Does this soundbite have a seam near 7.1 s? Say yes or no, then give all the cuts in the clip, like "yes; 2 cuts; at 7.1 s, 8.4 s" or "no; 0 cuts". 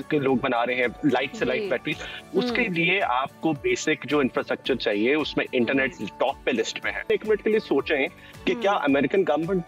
yes; 1 cut; at 7.1 s